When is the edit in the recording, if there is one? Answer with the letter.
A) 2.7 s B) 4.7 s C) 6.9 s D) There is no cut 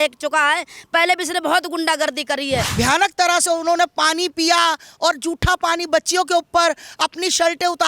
A